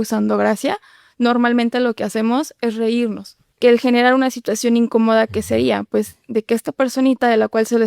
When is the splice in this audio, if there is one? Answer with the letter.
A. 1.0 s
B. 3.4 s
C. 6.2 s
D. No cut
B